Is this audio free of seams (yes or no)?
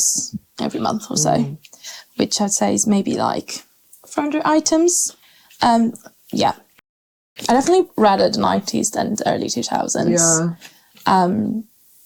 yes